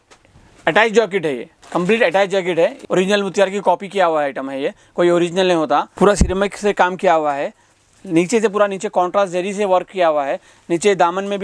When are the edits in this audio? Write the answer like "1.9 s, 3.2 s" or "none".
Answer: 2.8 s, 5.9 s